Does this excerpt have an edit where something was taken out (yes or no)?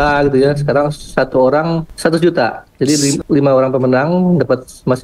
yes